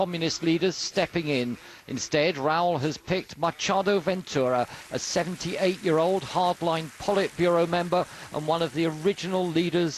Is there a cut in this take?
yes; 1 cut; at 7.3 s

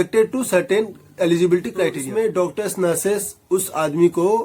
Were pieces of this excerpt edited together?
yes; 1 cut; at 2.0 s

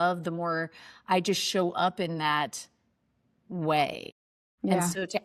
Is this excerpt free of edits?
yes; 0 cuts

